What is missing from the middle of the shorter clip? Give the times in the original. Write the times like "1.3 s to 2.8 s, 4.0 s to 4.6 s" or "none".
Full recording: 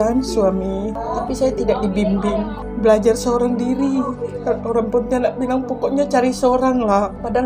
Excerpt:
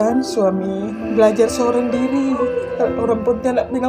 1.0 s to 2.6 s